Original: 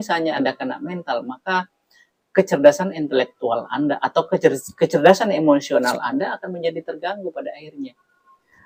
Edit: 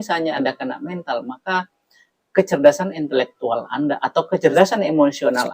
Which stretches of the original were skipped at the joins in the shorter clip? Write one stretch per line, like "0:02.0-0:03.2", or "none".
0:04.5-0:05.0